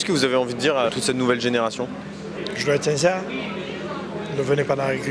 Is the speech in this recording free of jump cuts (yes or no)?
no